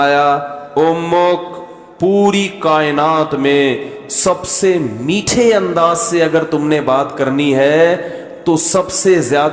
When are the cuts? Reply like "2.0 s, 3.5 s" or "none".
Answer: none